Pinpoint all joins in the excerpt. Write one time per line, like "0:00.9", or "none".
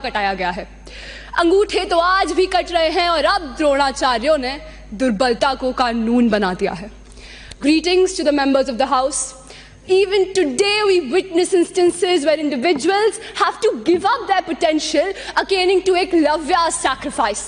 none